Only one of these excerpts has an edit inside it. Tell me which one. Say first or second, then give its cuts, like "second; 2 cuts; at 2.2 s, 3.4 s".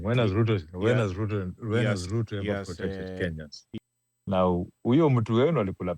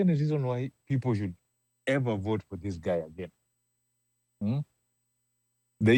first; 1 cut; at 3.6 s